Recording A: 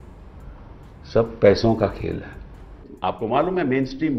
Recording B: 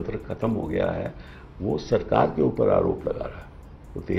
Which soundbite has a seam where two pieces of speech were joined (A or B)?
A